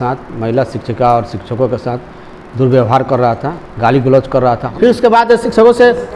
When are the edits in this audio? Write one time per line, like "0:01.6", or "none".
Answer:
0:04.6